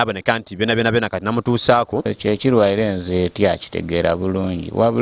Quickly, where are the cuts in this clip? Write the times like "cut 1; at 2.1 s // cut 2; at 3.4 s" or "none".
cut 1; at 2.1 s